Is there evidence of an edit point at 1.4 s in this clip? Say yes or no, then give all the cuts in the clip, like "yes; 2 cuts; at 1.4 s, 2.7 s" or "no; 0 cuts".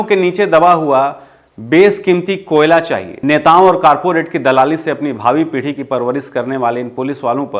no; 1 cut; at 3.1 s